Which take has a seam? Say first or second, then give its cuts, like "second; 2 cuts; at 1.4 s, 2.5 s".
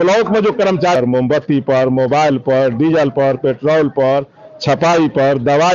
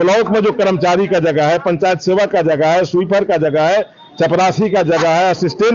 first; 1 cut; at 1.0 s